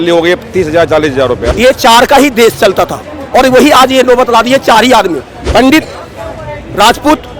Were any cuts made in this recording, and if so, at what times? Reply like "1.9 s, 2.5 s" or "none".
1.4 s, 5.3 s

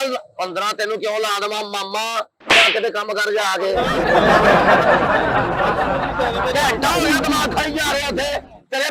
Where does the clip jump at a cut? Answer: none

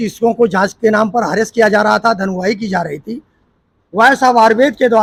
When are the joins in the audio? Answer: none

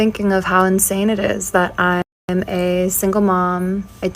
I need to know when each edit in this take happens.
2.2 s

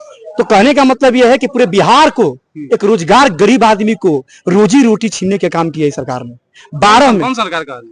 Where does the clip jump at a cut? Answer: none

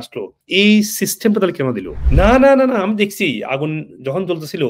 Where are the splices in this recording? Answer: 1.9 s

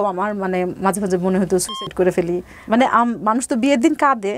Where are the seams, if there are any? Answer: 2.5 s

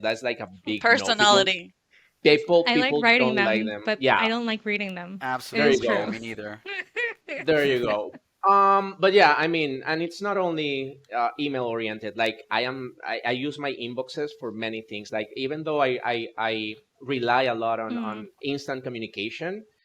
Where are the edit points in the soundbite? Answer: none

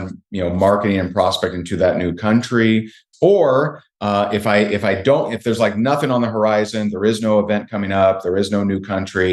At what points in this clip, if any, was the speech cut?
3.1 s

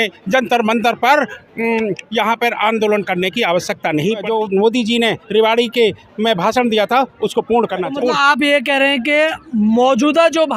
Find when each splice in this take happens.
4.2 s, 7.9 s

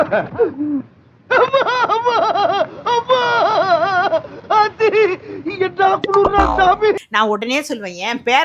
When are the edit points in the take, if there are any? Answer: 7.0 s

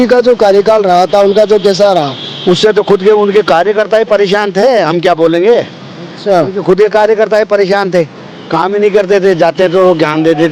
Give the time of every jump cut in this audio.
none

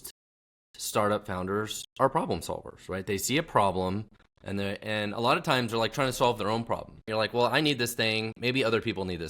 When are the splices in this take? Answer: 7.1 s

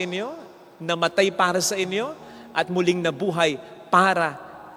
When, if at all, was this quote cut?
none

